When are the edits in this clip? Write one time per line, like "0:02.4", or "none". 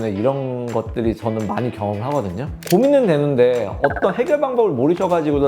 0:02.5

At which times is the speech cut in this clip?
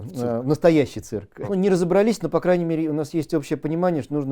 0:01.3

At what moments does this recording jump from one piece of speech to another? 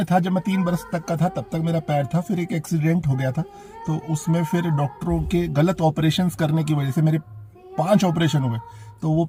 none

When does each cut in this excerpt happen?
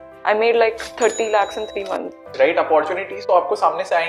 0:02.3

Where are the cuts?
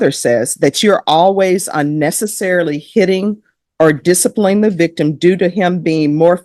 none

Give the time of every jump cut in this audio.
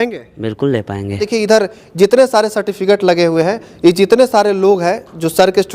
0:01.2

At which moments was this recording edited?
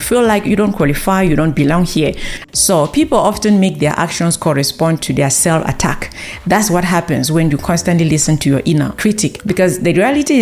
0:02.3

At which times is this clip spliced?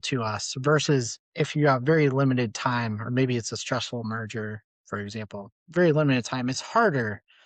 0:01.2
0:05.1

